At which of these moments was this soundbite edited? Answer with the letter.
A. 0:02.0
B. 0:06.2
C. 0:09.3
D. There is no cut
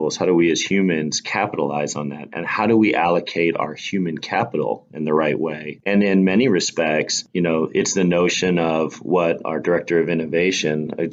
D